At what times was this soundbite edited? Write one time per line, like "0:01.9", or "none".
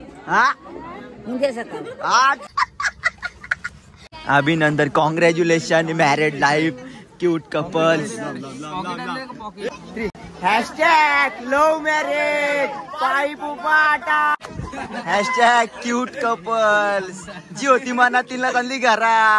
0:04.0
0:14.3